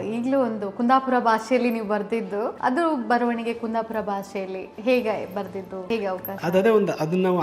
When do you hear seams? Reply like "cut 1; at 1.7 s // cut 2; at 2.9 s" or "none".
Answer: cut 1; at 2.5 s // cut 2; at 5.7 s